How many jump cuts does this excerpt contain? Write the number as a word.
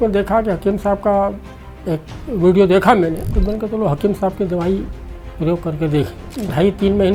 two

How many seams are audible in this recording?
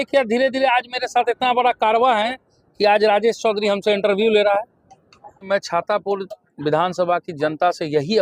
one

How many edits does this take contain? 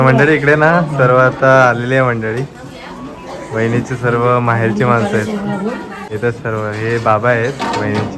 one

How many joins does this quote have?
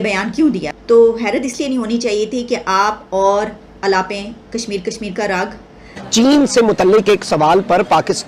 one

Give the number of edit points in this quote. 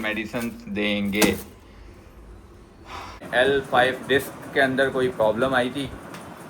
one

